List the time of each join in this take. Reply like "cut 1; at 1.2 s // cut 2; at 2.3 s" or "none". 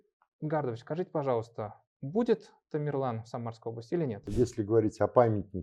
cut 1; at 4.3 s